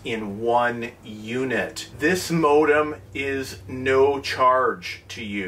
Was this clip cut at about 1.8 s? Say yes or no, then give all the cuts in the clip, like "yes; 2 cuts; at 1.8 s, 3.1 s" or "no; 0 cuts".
yes; 1 cut; at 1.8 s